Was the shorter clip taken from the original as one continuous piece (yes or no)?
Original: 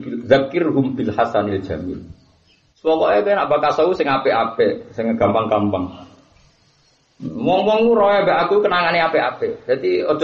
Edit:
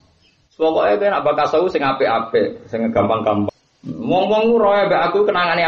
no